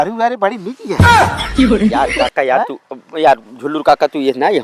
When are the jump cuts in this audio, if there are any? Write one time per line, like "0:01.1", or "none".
0:01.0
0:02.3